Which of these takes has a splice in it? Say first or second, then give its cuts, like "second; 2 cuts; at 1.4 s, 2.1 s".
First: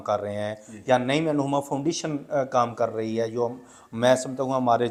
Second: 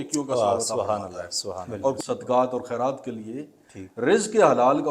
second; 1 cut; at 2.0 s